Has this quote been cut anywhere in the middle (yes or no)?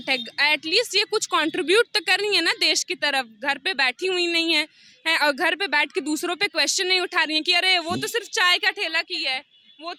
no